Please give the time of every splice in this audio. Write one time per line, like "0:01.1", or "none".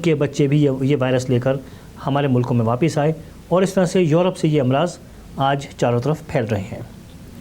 none